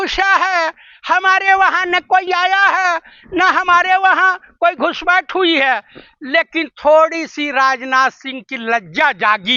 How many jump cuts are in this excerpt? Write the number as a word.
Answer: zero